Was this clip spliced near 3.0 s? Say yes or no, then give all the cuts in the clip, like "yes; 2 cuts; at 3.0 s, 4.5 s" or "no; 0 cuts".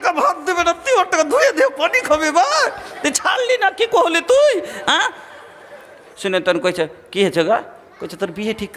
no; 1 cut; at 6.1 s